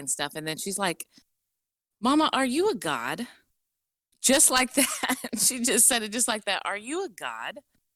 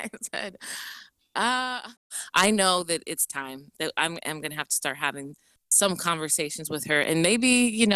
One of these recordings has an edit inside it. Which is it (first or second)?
second